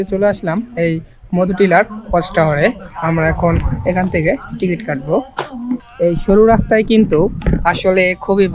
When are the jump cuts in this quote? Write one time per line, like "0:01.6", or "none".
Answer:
0:05.8